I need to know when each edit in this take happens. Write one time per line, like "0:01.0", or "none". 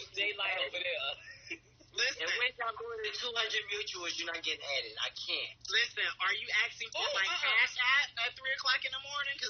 none

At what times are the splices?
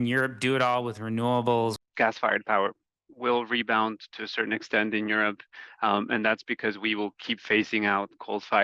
0:01.8

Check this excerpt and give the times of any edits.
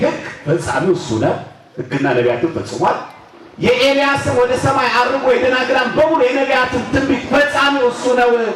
none

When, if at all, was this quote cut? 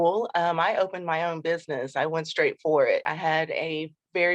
0:03.0

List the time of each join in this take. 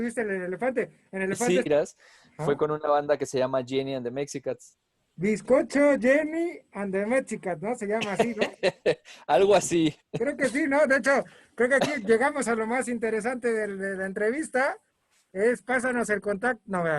0:01.7

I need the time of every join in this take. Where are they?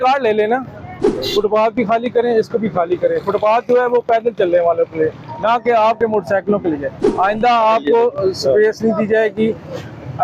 0:01.2
0:07.0

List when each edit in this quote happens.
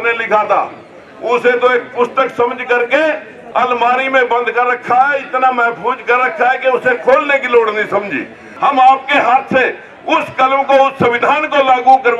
0:08.5

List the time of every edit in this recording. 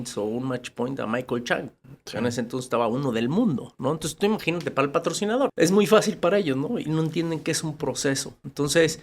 0:05.5

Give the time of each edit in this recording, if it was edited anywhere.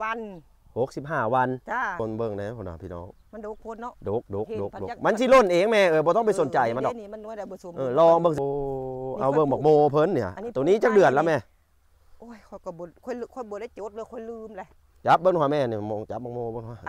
0:02.0
0:08.4

